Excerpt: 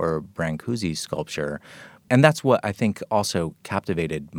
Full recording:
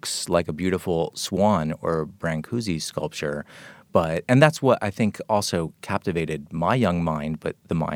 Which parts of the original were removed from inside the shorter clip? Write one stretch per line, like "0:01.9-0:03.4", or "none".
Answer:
0:03.9-0:04.2